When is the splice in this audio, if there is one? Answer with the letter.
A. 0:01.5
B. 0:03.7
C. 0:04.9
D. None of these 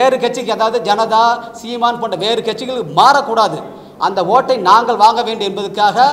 D